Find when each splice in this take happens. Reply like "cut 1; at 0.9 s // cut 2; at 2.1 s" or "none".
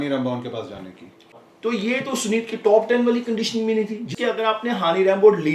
cut 1; at 1.4 s // cut 2; at 4.1 s